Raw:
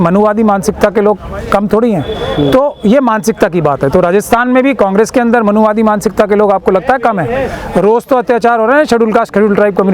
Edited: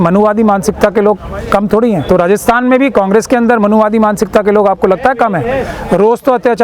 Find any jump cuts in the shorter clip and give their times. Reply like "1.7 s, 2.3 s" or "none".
2.1 s